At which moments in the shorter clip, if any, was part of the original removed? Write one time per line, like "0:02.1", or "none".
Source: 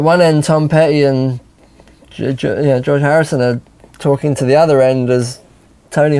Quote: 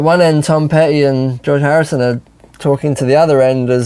0:01.4